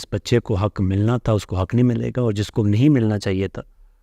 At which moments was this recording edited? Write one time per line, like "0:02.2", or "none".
none